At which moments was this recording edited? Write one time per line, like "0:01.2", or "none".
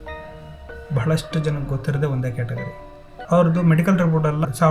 0:03.1